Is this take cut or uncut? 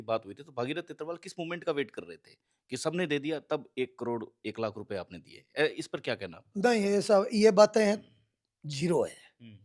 uncut